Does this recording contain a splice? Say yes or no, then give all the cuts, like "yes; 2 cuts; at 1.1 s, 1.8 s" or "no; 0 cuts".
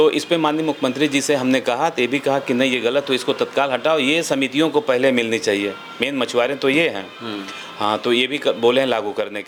no; 0 cuts